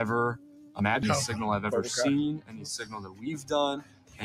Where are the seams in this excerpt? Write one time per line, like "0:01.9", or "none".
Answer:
0:01.0